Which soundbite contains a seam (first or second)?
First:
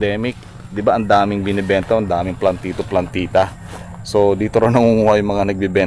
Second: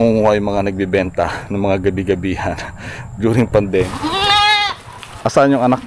second